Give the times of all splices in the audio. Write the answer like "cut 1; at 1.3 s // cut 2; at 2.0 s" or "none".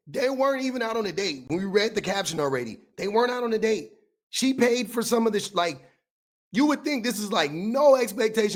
none